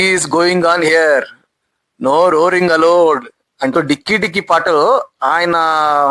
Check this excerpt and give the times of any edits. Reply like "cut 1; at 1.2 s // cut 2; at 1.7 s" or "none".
cut 1; at 3.7 s